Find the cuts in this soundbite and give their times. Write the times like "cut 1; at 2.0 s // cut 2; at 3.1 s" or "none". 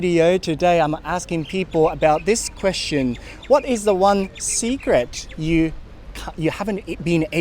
none